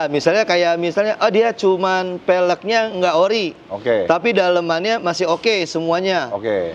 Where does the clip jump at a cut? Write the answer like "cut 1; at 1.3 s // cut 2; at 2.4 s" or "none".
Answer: none